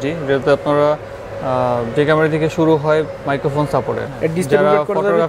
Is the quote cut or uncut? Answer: cut